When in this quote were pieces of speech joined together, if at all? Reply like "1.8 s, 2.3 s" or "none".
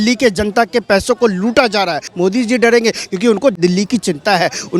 2.1 s, 3.6 s